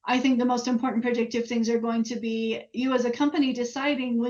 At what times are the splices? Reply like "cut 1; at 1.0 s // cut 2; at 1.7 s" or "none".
none

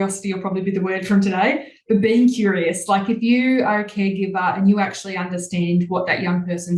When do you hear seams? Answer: none

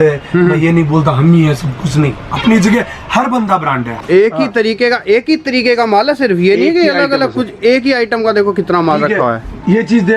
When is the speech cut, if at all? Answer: cut 1; at 4.0 s

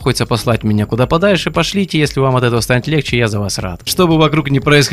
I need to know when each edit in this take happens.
cut 1; at 3.9 s

